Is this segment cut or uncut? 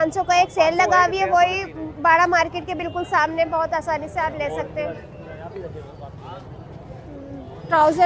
uncut